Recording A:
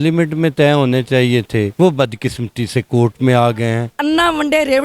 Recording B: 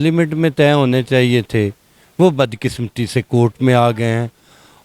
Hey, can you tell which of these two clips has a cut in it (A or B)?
A